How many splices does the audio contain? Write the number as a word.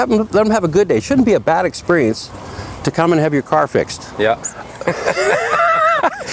one